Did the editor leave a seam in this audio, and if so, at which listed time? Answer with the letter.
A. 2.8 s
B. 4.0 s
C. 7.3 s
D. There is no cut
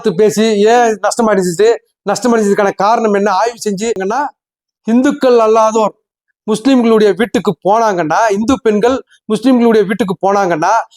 B